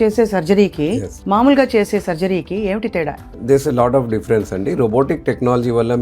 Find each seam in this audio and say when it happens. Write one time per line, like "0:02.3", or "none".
0:03.2